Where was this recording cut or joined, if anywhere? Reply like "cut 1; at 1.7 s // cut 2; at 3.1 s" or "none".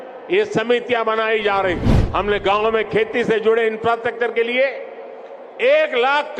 cut 1; at 1.9 s

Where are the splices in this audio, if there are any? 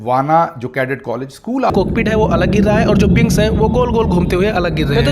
cut 1; at 1.7 s

